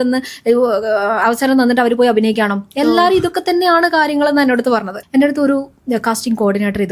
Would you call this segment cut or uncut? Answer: cut